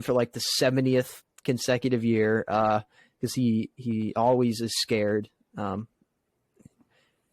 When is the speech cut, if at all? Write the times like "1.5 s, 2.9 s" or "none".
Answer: none